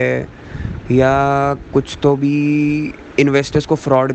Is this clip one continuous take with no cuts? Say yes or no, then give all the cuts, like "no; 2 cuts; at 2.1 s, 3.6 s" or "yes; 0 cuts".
yes; 0 cuts